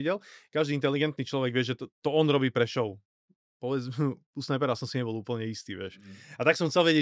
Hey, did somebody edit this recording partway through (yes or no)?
no